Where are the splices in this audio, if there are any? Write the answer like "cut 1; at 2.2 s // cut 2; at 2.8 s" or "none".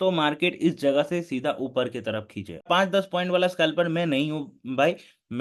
cut 1; at 2.6 s